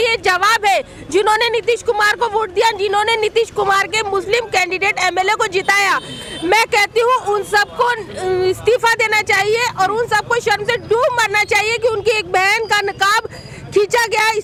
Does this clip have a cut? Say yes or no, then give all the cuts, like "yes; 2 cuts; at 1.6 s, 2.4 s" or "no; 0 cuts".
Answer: no; 0 cuts